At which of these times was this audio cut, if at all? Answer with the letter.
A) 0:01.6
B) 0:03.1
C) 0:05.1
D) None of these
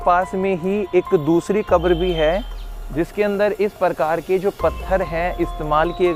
D